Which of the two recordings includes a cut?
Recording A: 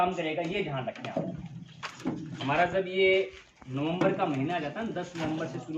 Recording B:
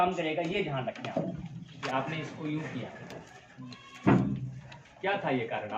B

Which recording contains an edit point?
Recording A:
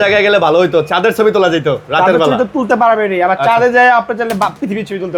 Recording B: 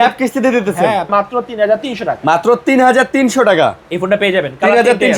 B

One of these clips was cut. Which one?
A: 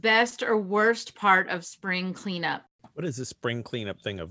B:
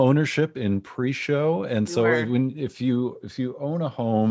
A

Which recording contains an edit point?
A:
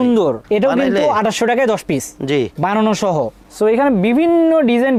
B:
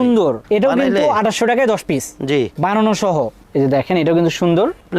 B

